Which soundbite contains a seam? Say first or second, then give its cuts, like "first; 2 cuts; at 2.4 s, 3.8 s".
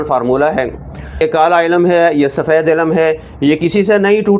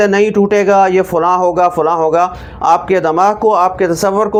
first; 1 cut; at 1.2 s